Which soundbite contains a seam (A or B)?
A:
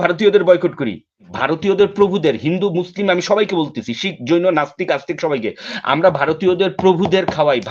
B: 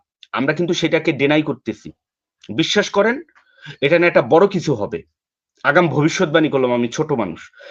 A